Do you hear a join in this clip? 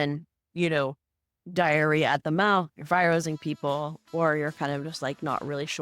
no; 0 cuts

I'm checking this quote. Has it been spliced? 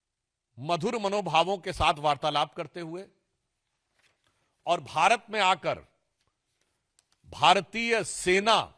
no; 0 cuts

